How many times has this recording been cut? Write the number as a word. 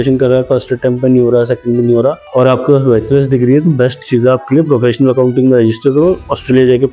one